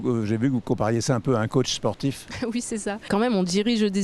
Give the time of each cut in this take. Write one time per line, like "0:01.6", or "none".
0:03.0